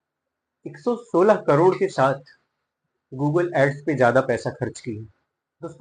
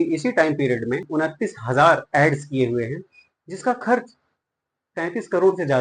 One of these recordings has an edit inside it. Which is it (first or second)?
second